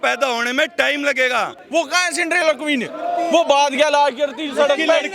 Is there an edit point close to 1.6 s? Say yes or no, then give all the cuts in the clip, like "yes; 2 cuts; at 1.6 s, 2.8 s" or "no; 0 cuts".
yes; 1 cut; at 1.6 s